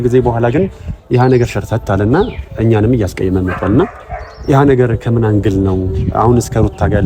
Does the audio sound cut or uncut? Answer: uncut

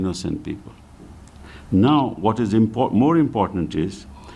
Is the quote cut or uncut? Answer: uncut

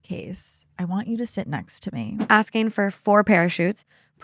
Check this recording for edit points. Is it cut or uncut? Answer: cut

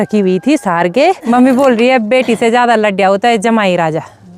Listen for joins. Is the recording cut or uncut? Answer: cut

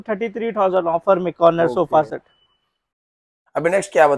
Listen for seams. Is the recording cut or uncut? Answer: uncut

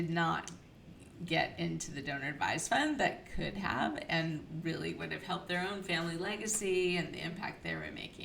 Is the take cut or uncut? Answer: uncut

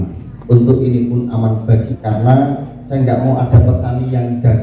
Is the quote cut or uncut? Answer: cut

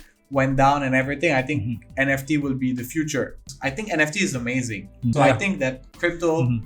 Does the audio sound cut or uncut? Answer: cut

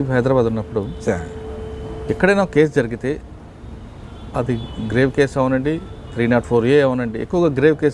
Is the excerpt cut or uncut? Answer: uncut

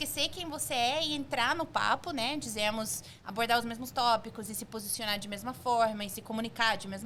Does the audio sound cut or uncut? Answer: uncut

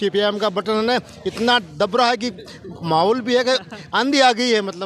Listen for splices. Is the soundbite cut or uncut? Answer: uncut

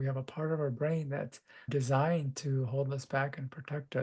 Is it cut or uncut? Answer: cut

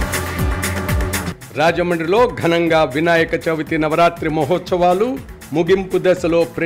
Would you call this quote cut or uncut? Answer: cut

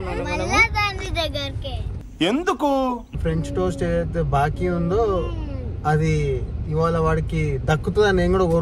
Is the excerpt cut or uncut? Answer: cut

